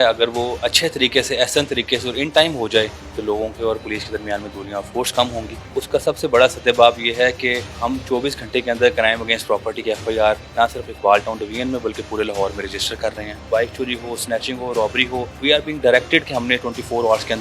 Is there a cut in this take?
yes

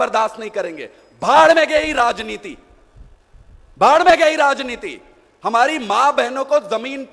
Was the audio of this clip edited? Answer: no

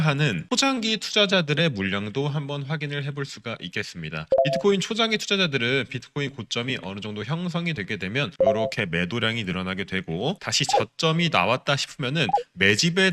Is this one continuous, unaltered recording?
yes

